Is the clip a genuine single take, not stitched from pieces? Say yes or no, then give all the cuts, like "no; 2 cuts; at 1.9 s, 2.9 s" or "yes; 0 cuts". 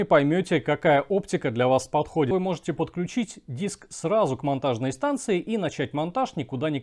no; 1 cut; at 2.3 s